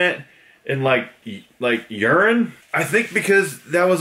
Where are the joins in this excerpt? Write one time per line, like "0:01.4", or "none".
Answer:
0:02.6